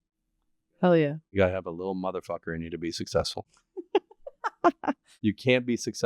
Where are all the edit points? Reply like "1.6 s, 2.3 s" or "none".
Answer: 5.1 s